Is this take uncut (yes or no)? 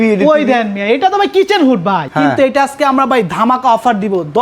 no